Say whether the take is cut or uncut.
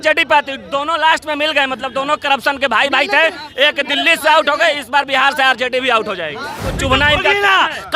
cut